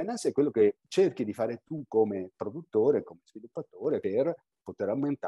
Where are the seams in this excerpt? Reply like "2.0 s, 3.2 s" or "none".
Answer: 0.8 s, 4.0 s